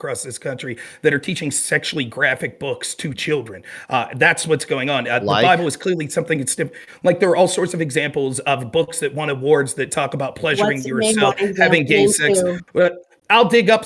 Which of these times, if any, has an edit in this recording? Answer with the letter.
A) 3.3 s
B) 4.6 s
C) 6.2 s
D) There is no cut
D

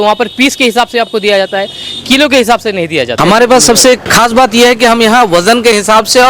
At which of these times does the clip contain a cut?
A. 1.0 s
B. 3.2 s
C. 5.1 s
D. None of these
B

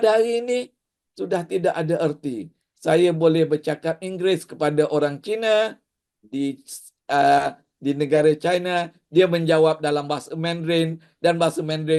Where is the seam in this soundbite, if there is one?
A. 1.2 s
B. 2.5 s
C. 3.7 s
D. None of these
D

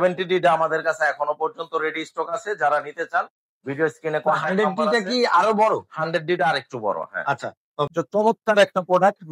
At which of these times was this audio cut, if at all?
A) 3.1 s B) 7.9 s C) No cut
B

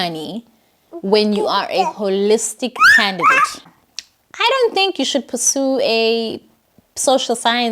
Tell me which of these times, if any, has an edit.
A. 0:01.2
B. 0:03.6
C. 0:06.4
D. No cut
B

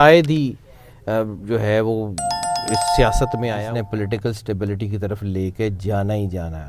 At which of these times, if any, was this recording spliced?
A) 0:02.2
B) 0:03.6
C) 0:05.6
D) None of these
B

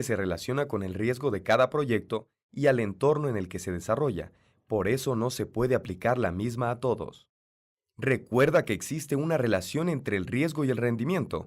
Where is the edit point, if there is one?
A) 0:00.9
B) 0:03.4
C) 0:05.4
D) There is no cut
A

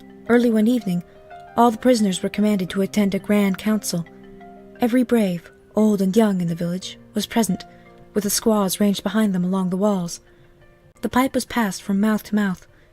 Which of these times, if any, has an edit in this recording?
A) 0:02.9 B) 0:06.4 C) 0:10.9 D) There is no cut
B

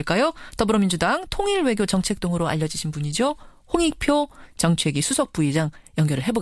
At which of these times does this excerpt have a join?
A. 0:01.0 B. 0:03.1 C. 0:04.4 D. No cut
A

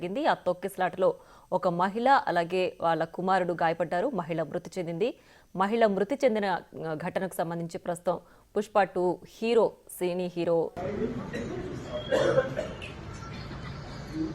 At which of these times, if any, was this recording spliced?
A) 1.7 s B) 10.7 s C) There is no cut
B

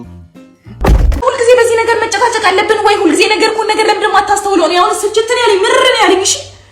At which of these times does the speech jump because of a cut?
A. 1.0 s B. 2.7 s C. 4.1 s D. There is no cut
A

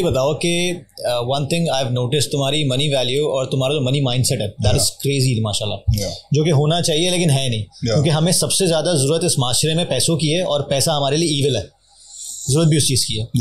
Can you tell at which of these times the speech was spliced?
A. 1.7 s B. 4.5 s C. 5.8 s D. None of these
D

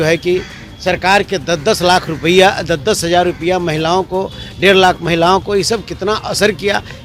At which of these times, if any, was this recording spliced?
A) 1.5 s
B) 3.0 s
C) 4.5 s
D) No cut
D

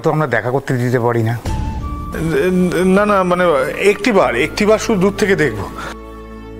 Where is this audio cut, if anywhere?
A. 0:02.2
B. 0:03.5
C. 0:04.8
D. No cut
D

